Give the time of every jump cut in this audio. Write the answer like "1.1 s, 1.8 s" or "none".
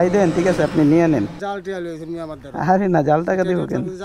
1.4 s